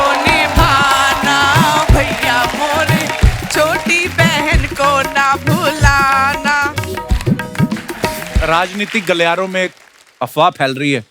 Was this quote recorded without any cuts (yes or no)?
no